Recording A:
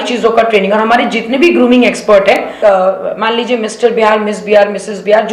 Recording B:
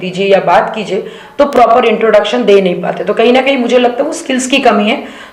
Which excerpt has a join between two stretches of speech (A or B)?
A